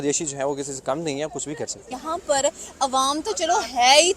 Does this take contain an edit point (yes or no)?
yes